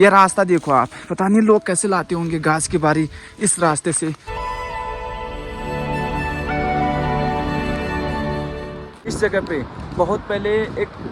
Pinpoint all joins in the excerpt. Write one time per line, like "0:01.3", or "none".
0:04.3
0:09.0